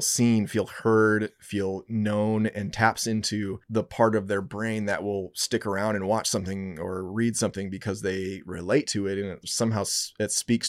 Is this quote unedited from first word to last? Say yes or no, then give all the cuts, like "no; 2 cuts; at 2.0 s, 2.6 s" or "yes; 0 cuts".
yes; 0 cuts